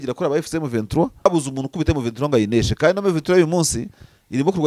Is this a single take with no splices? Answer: no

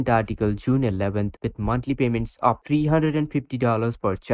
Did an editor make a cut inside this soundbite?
yes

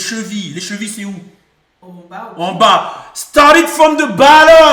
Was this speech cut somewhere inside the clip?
no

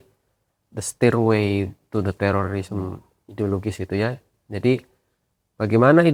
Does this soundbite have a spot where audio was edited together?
no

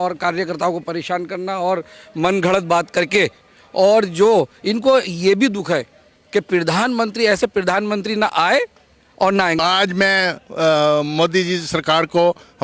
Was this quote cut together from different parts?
yes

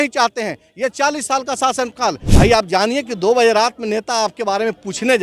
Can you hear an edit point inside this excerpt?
yes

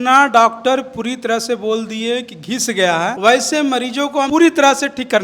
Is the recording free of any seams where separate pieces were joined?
no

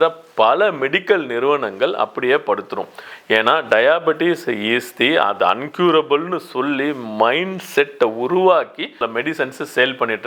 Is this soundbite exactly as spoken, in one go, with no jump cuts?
yes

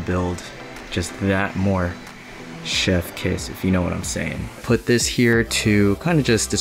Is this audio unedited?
no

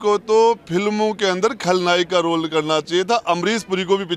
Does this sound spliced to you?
no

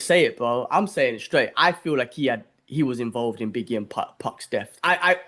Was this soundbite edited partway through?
no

